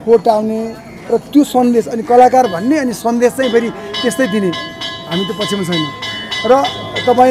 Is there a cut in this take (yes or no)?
no